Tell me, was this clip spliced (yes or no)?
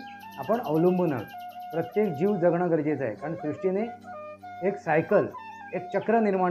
no